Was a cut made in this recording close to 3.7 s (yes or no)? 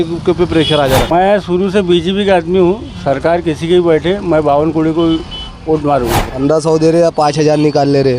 no